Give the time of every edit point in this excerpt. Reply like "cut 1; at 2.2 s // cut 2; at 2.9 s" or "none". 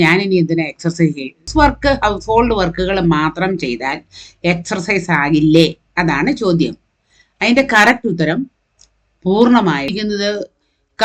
cut 1; at 1.5 s // cut 2; at 9.9 s